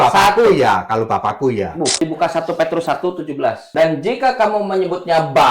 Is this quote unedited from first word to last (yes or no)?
no